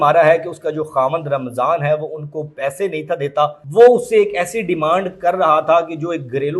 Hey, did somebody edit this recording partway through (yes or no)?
yes